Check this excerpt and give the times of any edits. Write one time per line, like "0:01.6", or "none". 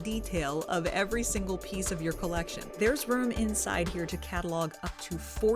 0:02.7